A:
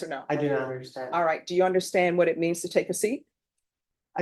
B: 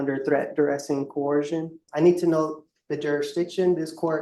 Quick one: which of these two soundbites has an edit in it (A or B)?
B